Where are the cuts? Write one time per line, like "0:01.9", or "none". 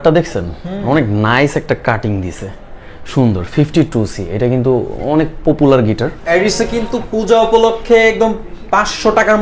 0:06.2